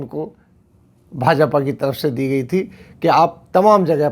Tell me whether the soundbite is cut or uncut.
uncut